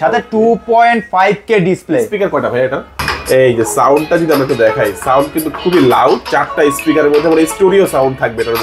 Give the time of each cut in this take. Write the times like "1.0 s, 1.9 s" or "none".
2.9 s